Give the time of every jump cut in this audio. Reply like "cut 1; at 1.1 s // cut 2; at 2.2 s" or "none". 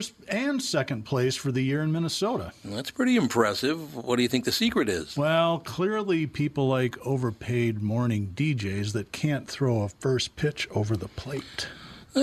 none